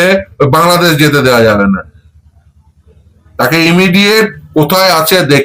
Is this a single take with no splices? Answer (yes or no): yes